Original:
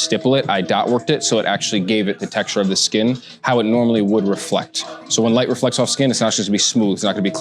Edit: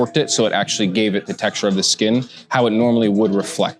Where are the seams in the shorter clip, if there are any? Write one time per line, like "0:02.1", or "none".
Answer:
none